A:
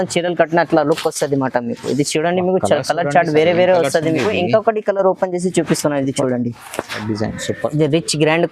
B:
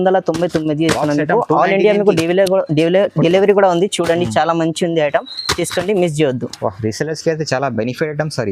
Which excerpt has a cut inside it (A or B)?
A